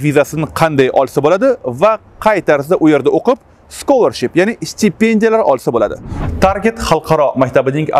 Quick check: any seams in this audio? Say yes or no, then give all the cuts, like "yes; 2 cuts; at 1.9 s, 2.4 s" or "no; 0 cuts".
yes; 1 cut; at 6.2 s